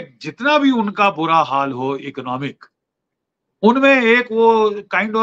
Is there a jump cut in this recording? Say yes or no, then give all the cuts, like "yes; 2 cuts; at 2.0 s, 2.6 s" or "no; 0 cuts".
no; 0 cuts